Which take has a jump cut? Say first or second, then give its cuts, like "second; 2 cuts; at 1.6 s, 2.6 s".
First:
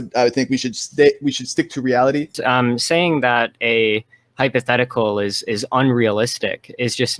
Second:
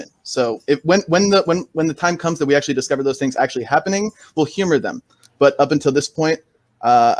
first; 1 cut; at 2.4 s